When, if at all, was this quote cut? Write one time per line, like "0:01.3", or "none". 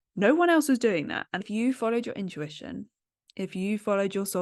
0:01.4